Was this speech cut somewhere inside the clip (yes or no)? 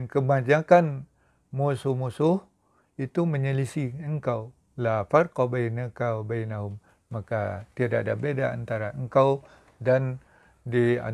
no